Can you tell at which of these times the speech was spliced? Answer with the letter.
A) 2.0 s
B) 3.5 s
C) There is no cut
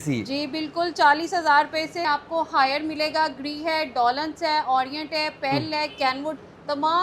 A